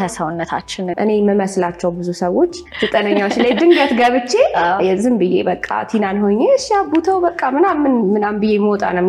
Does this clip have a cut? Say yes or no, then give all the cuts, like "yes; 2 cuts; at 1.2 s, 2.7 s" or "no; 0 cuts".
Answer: yes; 1 cut; at 0.9 s